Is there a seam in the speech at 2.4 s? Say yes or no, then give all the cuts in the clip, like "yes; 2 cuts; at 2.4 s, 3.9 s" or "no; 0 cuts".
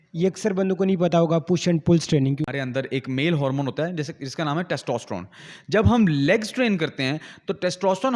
yes; 1 cut; at 2.4 s